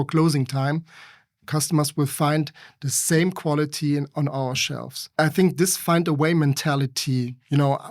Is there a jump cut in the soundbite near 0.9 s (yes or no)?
no